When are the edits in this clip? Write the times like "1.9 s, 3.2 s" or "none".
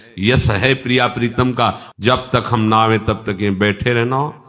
1.8 s